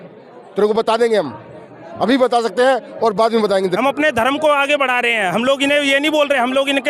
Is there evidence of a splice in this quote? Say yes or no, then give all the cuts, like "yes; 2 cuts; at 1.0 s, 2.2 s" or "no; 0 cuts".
yes; 1 cut; at 3.7 s